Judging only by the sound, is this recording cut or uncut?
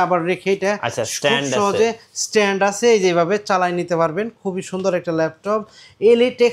uncut